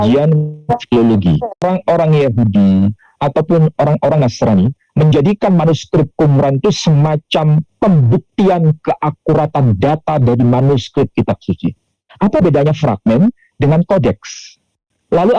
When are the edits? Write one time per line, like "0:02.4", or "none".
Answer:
0:01.6
0:12.0